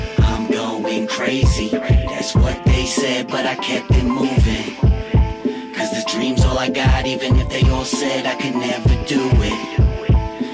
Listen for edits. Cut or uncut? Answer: uncut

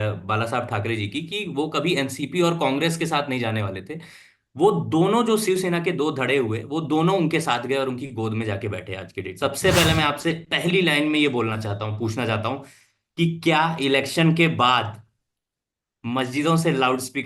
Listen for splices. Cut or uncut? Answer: cut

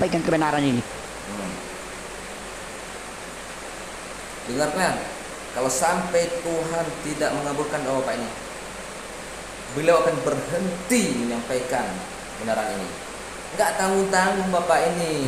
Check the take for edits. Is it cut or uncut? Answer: uncut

